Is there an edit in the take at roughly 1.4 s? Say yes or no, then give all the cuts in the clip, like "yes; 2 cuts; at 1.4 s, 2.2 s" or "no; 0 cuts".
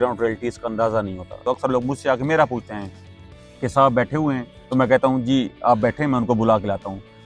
yes; 1 cut; at 1.4 s